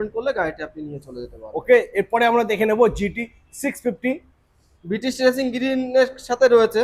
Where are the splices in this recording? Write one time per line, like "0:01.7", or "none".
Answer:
none